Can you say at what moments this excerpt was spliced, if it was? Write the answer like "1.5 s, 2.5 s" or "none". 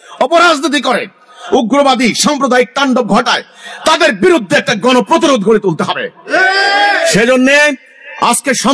none